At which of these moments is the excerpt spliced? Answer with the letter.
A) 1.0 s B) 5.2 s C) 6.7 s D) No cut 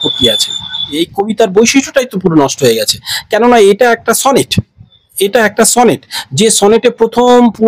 A